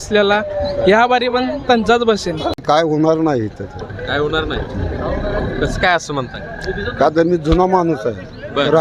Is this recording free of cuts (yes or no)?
no